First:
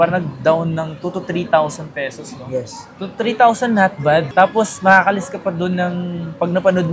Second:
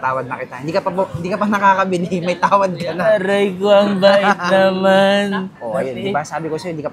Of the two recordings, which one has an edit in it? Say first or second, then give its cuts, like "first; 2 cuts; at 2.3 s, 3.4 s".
second; 1 cut; at 5.5 s